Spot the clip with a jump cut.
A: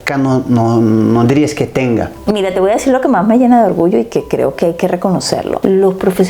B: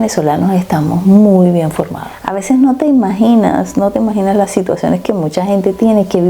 B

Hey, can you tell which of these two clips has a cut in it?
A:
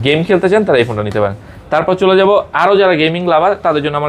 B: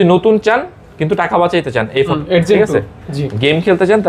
B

